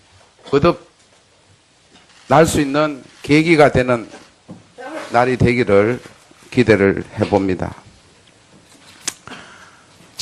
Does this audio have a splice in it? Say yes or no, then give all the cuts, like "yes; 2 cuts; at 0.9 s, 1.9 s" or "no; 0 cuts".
yes; 1 cut; at 5.1 s